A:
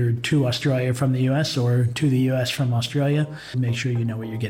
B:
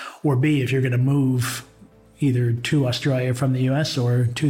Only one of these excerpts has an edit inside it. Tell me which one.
A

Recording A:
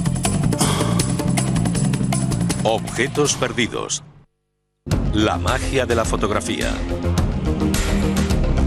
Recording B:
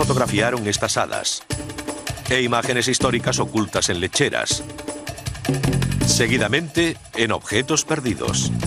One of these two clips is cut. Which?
B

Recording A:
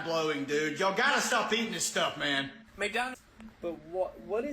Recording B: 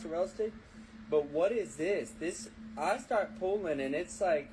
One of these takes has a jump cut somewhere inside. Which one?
A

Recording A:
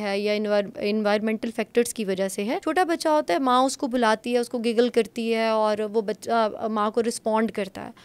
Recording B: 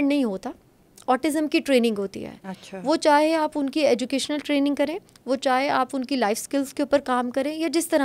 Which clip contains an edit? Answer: A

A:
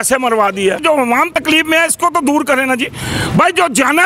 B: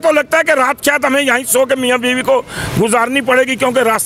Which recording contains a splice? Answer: A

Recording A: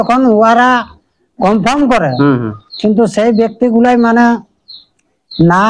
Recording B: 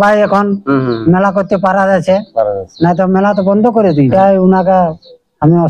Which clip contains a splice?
B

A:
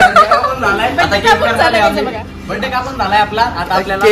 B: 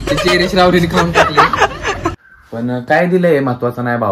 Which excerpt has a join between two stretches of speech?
B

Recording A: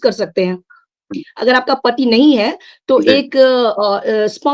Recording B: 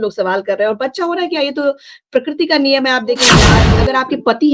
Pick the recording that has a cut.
B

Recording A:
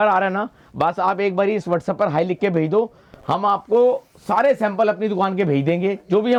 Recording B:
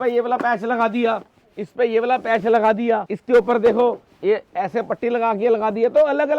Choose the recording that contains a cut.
B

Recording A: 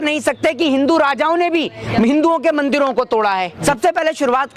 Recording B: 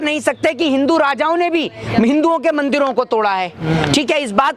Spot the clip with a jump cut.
A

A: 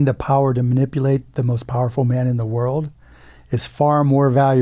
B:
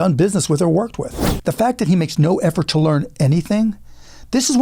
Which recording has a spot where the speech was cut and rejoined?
B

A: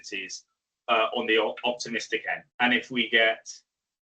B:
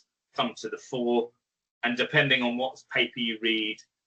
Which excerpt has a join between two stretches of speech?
A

